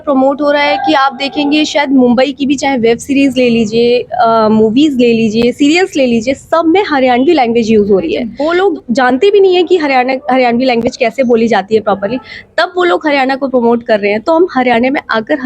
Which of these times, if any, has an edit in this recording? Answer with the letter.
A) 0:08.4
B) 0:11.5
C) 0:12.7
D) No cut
A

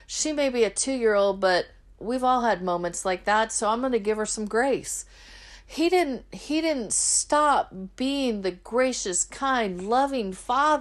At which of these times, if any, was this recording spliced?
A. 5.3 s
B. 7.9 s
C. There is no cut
C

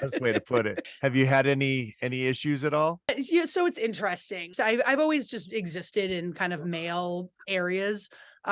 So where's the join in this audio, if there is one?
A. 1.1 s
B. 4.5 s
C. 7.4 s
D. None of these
B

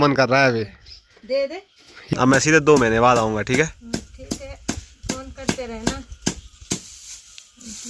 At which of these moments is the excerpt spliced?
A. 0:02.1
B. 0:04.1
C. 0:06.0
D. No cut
A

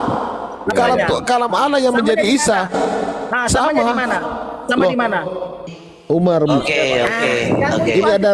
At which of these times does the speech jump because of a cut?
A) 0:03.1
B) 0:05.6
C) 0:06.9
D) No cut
B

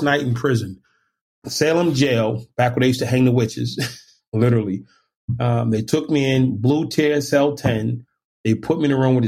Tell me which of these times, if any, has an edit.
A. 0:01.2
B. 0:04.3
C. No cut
A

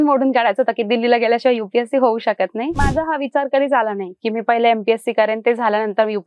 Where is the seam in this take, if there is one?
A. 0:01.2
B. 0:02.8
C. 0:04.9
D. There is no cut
B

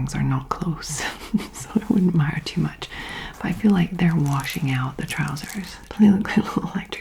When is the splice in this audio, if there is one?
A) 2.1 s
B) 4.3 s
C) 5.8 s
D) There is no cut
C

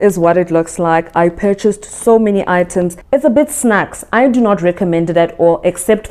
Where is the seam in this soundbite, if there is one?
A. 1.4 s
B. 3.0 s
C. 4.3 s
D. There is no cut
B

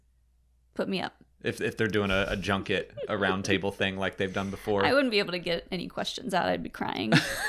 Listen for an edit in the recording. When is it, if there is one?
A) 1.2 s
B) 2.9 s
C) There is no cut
A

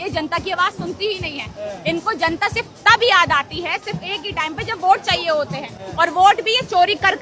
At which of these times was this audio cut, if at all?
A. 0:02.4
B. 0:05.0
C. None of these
C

